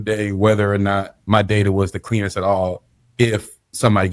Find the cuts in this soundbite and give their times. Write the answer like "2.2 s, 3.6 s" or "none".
none